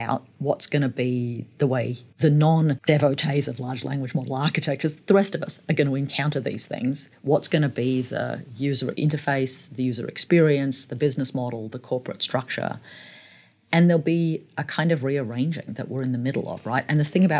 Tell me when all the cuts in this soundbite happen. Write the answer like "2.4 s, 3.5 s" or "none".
2.0 s, 2.8 s, 8.9 s